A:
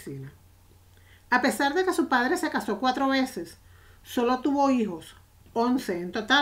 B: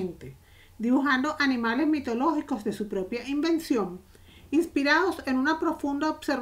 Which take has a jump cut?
B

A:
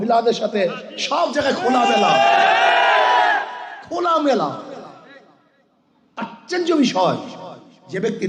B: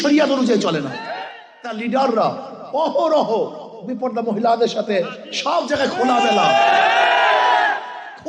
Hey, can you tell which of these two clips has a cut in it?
B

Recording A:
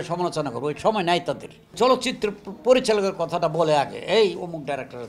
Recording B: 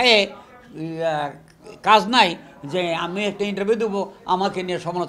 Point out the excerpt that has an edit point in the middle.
A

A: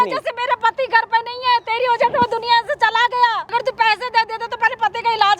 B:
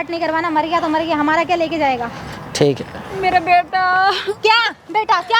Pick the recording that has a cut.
A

